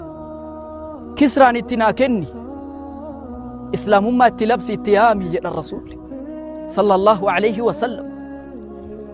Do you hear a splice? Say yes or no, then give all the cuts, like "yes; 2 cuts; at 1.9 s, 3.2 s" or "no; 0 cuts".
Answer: no; 0 cuts